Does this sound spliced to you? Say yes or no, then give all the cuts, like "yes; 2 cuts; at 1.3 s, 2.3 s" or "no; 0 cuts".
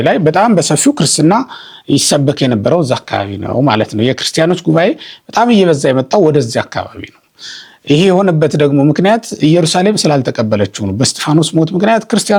no; 0 cuts